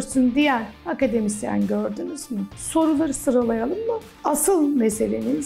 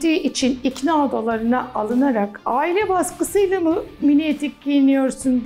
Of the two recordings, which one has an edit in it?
first; 2 cuts; at 2.5 s, 4.1 s

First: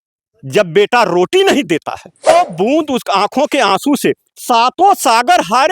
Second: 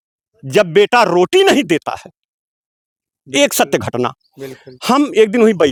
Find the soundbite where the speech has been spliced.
first; 1 cut; at 2.3 s

